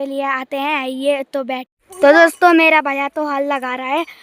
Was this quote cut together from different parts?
yes; 1 cut; at 1.8 s

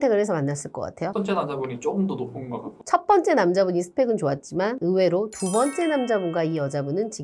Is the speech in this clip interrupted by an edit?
yes; 1 cut; at 1.2 s

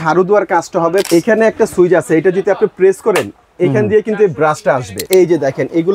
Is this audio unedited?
no; 2 cuts; at 1.1 s, 5.0 s

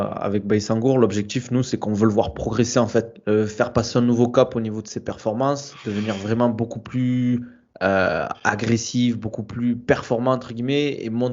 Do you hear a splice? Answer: no; 0 cuts

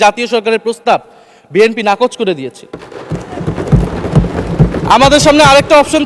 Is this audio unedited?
yes; 0 cuts

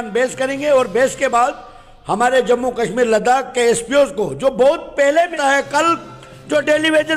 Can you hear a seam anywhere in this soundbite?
yes; 1 cut; at 5.3 s

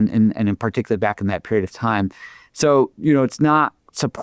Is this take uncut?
yes; 0 cuts

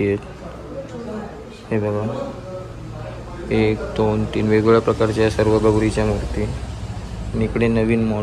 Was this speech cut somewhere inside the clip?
no; 0 cuts

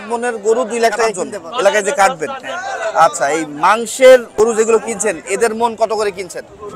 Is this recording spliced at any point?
yes; 2 cuts; at 1.2 s, 4.3 s

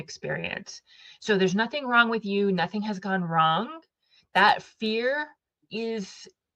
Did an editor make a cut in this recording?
no; 0 cuts

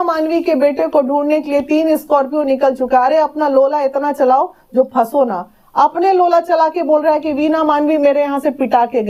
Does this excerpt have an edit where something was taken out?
no; 0 cuts

